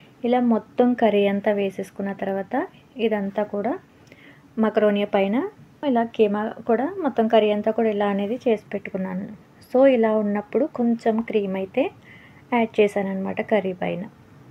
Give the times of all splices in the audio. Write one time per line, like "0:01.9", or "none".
0:05.8